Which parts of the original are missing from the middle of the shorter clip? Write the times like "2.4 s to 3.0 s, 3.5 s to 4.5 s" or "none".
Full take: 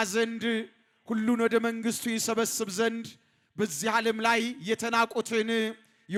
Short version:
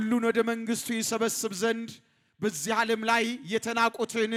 none